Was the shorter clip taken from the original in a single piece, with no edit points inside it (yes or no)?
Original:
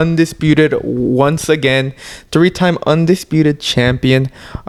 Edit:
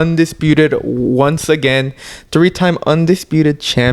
yes